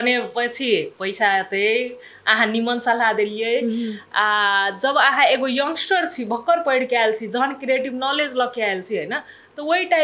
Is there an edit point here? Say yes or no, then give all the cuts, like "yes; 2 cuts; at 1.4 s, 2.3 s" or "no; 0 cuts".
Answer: no; 0 cuts